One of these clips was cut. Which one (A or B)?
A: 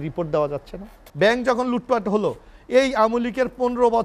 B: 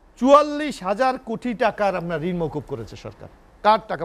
A